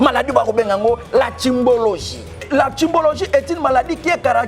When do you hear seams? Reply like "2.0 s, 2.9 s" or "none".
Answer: 2.4 s